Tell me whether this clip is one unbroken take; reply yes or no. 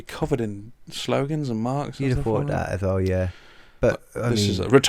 yes